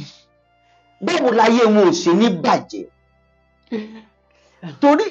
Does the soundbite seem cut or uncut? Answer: uncut